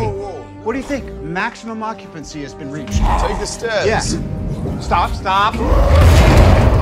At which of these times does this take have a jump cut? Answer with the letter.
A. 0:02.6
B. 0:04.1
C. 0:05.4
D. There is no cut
D